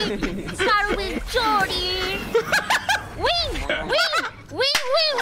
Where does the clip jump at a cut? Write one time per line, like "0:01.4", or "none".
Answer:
none